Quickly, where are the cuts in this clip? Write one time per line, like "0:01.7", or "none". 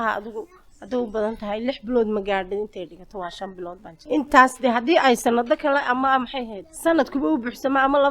0:03.9
0:06.6